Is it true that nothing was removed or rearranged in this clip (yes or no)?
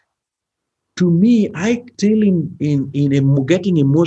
no